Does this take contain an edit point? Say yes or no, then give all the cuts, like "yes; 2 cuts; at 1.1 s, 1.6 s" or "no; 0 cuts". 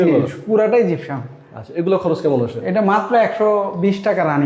no; 0 cuts